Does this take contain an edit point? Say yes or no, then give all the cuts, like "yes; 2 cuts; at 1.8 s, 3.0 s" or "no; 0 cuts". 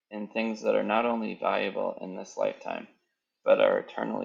no; 0 cuts